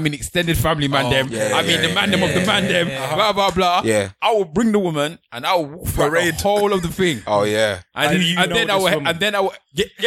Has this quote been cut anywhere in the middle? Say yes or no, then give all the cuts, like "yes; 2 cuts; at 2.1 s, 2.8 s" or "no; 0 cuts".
no; 0 cuts